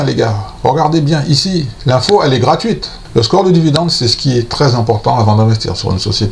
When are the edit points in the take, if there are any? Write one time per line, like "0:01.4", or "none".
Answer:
0:02.9